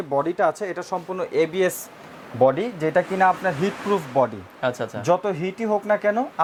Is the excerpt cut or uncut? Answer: uncut